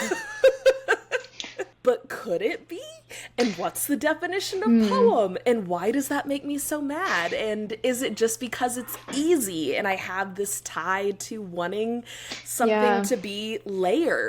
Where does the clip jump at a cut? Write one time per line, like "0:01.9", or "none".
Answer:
0:01.6